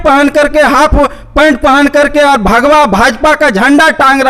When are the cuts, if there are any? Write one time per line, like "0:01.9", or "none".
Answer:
none